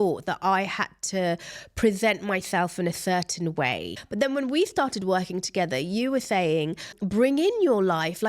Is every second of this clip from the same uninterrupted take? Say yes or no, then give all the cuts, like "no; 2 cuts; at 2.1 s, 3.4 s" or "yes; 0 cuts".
no; 2 cuts; at 4.0 s, 7.0 s